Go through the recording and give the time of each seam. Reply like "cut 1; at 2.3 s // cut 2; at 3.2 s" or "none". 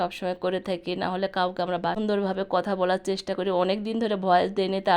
cut 1; at 2.0 s

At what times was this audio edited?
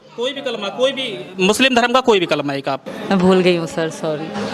cut 1; at 2.9 s

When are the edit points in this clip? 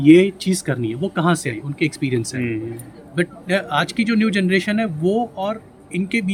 none

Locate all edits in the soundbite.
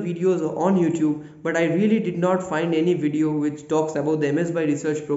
none

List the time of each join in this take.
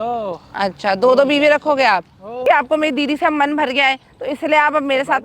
cut 1; at 2.4 s

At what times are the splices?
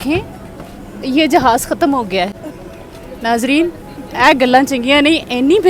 none

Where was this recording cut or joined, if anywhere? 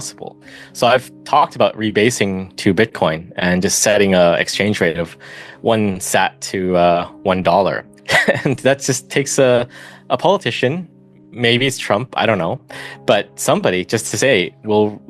cut 1; at 7.9 s

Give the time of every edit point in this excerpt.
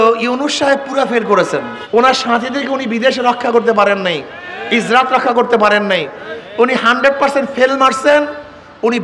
cut 1; at 1.3 s

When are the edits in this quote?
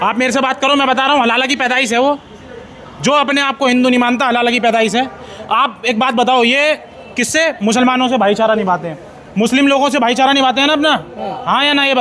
none

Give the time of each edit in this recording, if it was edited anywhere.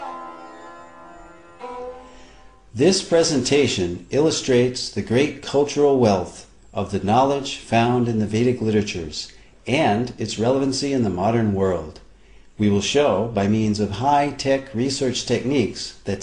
none

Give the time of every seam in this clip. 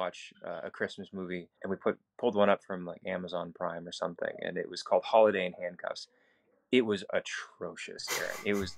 cut 1; at 1.5 s

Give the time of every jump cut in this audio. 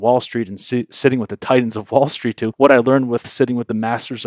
cut 1; at 2.5 s

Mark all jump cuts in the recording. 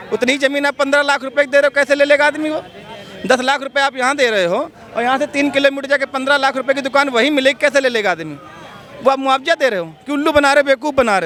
none

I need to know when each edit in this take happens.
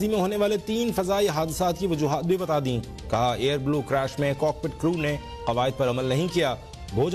none

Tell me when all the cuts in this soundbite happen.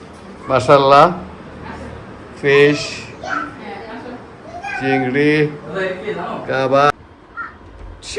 cut 1; at 6.9 s

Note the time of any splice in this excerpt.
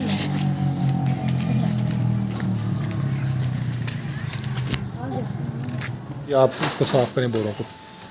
cut 1; at 6.3 s

